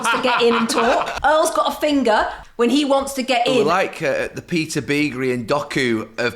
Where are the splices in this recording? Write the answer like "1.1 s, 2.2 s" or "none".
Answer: 1.1 s, 2.4 s, 3.6 s